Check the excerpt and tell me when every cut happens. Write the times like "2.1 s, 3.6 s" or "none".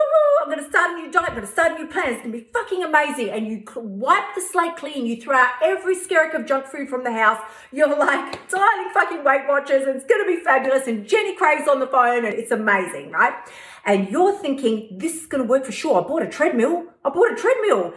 12.3 s